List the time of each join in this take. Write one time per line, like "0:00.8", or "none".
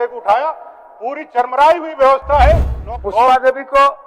0:02.7